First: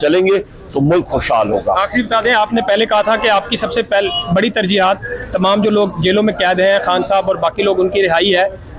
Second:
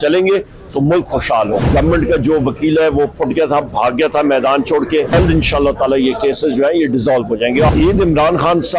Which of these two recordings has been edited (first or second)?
second